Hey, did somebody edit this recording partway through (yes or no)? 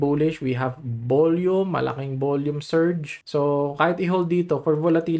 no